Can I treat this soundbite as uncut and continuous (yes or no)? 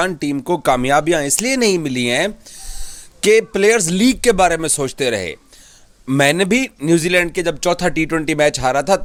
yes